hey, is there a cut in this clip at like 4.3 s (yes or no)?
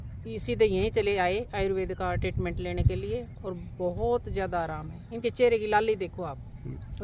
no